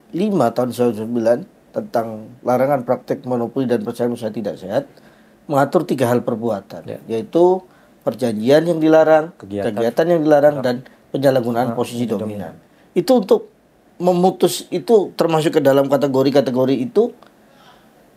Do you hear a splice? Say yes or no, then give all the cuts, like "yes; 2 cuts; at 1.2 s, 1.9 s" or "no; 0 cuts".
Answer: no; 0 cuts